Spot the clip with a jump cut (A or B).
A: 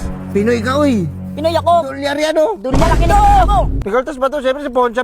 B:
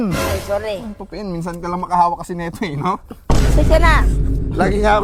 A